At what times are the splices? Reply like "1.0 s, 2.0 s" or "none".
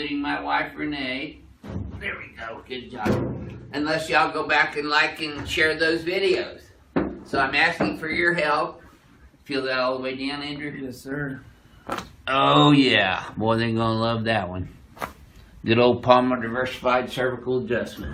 15.2 s